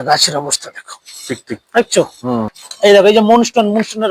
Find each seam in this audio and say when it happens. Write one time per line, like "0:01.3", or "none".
0:02.6